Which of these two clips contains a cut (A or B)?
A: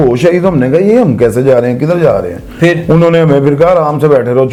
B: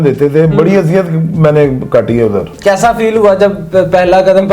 B